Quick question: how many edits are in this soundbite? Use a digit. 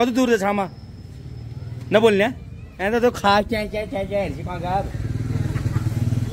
0